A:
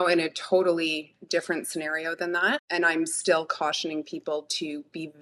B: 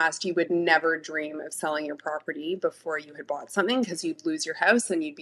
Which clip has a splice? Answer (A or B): A